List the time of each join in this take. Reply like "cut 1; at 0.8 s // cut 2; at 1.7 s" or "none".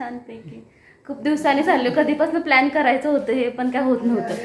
none